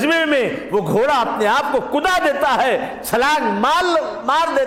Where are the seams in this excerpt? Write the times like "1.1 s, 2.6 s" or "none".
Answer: none

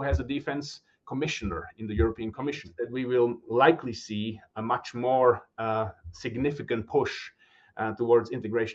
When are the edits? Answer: 2.7 s

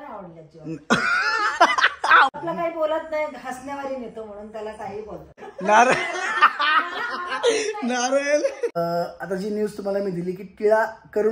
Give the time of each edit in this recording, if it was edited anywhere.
2.3 s, 5.5 s, 8.8 s

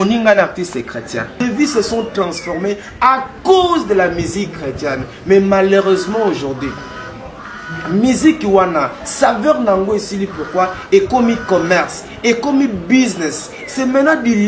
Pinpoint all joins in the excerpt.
1.3 s

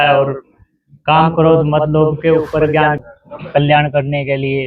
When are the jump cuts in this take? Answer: 3.1 s

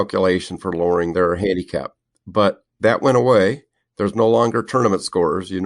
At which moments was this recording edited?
1.1 s

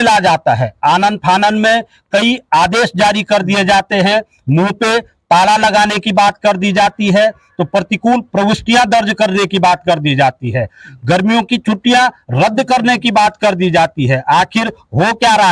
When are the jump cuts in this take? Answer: none

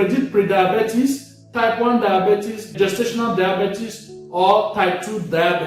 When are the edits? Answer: 2.7 s

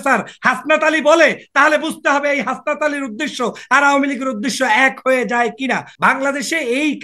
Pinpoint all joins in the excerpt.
5.9 s

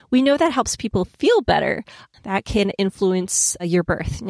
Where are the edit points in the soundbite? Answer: 2.1 s

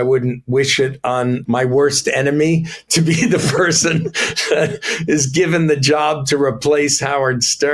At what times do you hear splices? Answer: 1.4 s

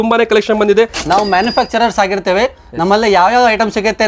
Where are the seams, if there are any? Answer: 1.0 s

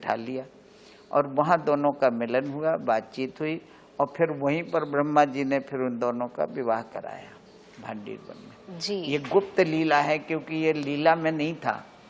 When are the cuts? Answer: none

